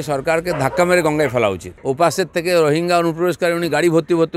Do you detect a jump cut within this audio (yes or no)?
yes